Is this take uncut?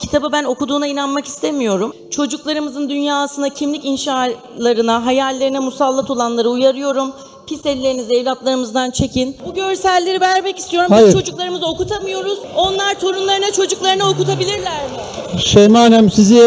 no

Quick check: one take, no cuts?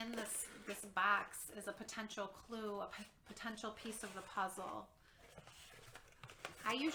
yes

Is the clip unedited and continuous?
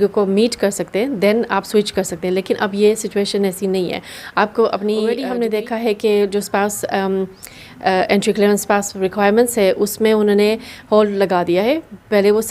no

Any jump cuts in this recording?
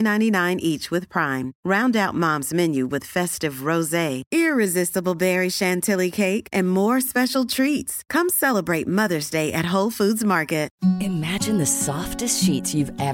yes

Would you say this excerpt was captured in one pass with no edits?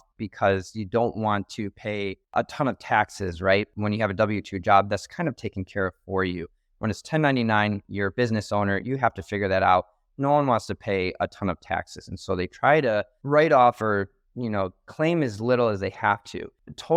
yes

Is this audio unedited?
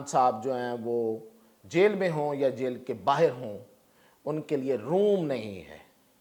yes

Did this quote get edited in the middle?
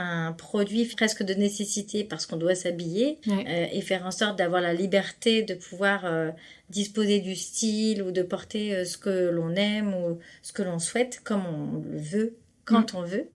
yes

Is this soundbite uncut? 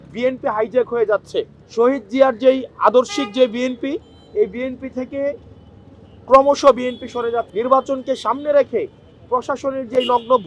no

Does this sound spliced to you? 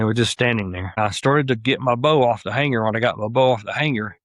yes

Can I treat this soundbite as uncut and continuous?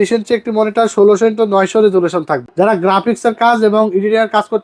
no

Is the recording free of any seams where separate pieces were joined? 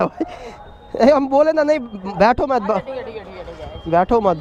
yes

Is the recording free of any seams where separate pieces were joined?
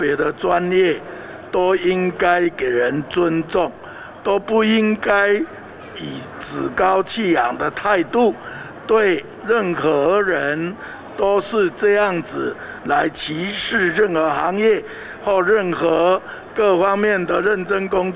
yes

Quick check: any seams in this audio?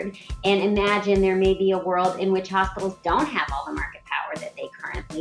no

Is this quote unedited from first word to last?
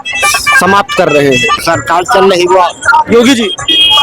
no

